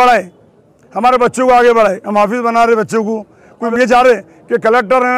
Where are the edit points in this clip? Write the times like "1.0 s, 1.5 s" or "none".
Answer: 3.7 s